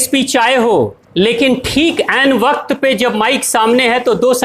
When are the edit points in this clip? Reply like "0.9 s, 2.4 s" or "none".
1.0 s